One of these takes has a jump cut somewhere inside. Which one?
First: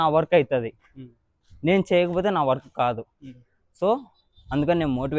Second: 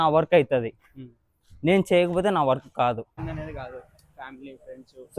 second; 1 cut; at 3.2 s

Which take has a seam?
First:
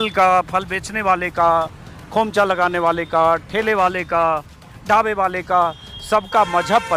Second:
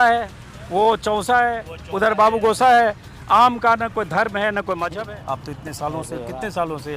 second; 1 cut; at 5.0 s

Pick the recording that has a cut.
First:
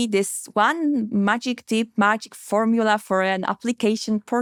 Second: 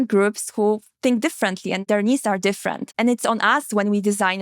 second; 2 cuts; at 1.8 s, 2.9 s

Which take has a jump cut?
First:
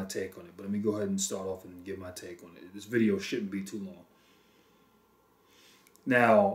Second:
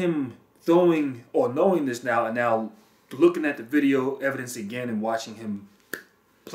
first; 1 cut; at 4.1 s

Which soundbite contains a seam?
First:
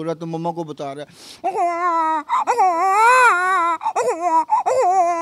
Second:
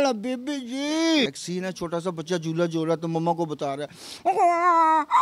second; 1 cut; at 1.3 s

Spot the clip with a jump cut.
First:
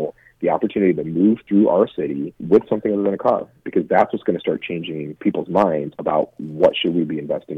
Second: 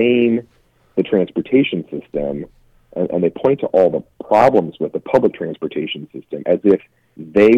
first; 3 cuts; at 2.3 s, 5.0 s, 5.9 s

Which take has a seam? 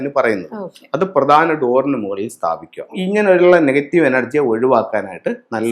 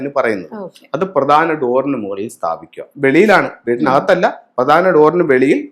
first; 1 cut; at 2.9 s

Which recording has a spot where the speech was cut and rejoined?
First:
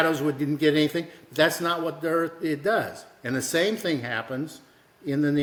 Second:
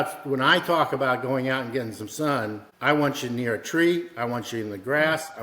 second; 1 cut; at 2.7 s

